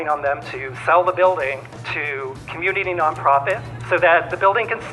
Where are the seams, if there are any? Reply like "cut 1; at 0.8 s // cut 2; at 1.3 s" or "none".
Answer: cut 1; at 2.2 s // cut 2; at 3.7 s